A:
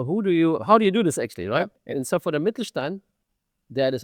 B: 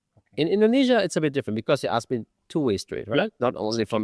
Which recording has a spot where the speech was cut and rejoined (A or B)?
A